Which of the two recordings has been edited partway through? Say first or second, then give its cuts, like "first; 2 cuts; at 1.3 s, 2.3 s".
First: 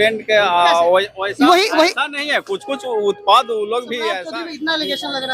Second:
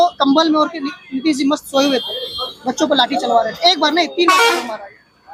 first; 1 cut; at 4.2 s